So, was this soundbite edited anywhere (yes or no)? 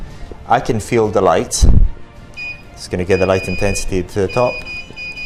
no